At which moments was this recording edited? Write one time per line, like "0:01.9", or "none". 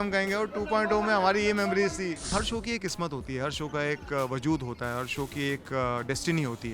0:02.3